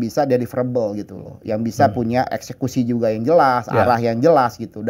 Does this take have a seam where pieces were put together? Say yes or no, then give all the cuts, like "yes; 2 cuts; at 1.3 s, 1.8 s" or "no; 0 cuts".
yes; 1 cut; at 2.4 s